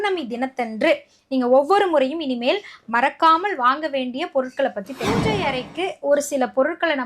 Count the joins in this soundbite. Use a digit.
1